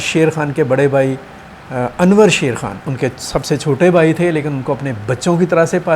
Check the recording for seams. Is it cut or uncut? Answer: uncut